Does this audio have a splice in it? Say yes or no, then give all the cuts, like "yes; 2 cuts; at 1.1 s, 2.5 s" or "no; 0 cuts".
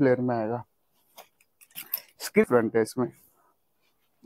yes; 1 cut; at 2.4 s